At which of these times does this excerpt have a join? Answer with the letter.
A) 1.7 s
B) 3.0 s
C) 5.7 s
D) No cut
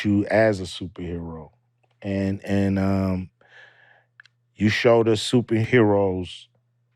C